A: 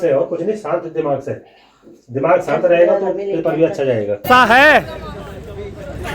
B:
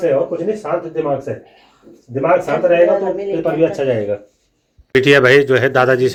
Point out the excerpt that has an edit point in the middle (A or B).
A